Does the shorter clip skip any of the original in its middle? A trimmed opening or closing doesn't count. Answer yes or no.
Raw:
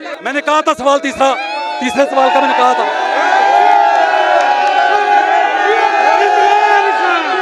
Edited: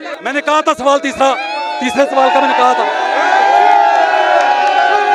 no